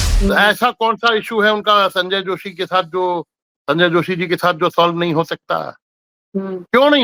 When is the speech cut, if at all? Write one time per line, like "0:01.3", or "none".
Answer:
none